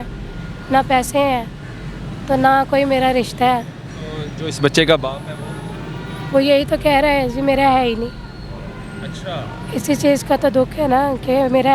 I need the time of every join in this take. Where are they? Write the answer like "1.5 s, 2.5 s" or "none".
none